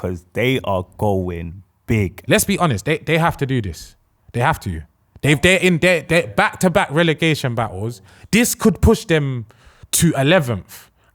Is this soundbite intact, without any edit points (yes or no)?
no